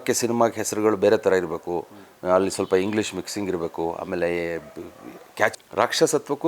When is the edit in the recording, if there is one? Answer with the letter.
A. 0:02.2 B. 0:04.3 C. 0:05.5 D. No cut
C